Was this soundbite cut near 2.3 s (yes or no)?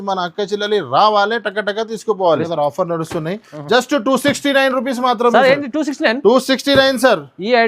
yes